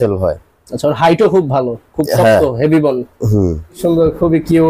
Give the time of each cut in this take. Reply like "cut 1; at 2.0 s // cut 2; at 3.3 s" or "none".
cut 1; at 3.8 s